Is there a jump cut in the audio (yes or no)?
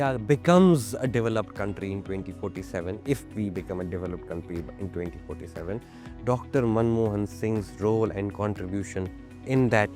no